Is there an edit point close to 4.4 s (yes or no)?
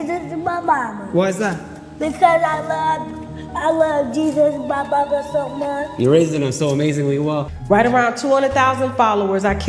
no